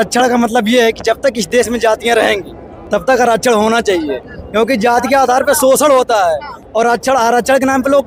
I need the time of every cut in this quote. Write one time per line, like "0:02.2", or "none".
none